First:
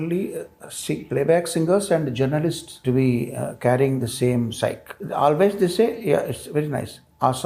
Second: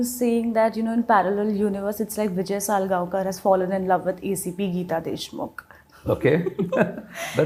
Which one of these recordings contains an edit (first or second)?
first